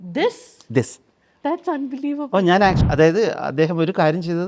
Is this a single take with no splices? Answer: no; 1 cut; at 2.8 s

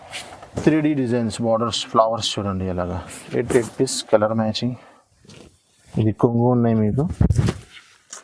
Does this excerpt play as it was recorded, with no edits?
no; 1 cut; at 5.4 s

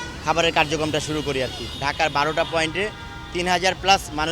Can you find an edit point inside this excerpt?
yes; 1 cut; at 1.7 s

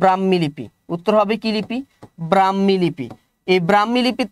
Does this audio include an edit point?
no; 0 cuts

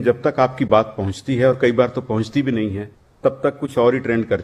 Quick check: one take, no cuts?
yes; 0 cuts

